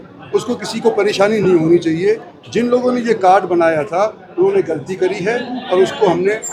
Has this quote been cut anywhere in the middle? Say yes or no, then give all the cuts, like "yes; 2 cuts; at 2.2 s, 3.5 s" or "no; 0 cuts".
no; 0 cuts